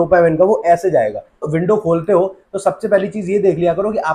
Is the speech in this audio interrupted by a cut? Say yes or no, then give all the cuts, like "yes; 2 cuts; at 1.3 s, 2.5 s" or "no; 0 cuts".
yes; 1 cut; at 1.5 s